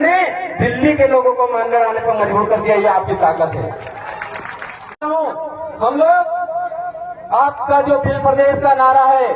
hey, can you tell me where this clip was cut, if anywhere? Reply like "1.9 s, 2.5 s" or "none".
5.1 s